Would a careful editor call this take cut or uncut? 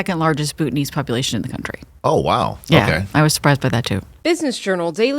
cut